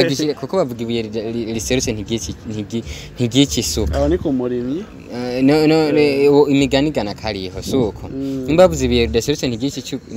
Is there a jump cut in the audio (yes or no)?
no